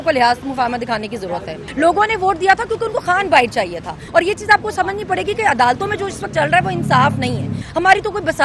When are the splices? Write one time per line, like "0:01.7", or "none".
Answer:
0:01.6
0:04.0
0:07.6